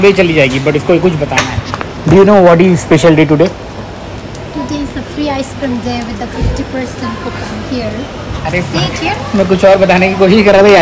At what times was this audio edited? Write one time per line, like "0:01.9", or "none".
none